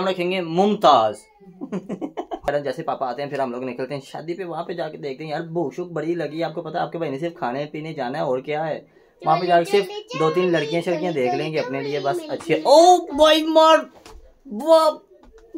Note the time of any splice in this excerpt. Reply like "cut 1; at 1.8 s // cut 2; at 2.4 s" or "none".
cut 1; at 2.5 s // cut 2; at 14.6 s